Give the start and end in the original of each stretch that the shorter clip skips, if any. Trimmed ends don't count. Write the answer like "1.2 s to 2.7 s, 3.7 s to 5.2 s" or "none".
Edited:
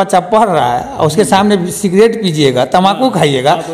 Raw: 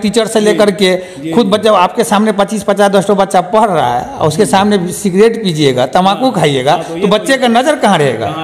none